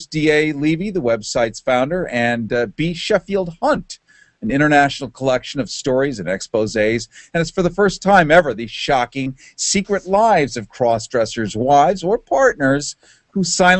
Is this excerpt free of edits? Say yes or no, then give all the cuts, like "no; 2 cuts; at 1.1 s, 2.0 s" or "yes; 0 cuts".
yes; 0 cuts